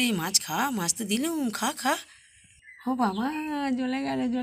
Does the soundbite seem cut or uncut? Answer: uncut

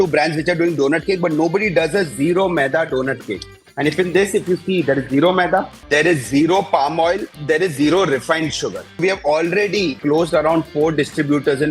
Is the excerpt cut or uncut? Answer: cut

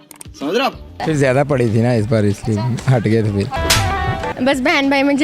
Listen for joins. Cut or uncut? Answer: cut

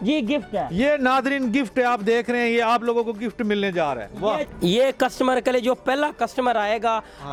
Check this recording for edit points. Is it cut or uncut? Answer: uncut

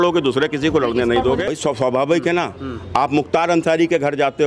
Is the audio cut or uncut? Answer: cut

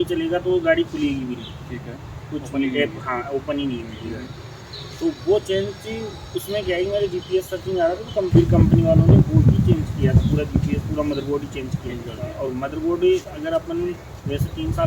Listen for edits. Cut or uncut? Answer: cut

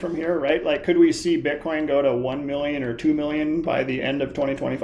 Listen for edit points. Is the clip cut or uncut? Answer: uncut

